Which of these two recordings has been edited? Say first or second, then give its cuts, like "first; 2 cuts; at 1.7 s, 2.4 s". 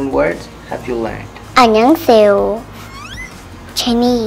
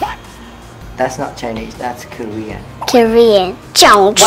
first; 1 cut; at 1.3 s